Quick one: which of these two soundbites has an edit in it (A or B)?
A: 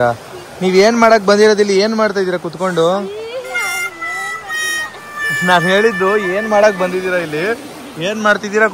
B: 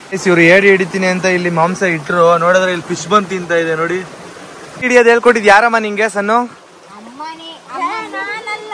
B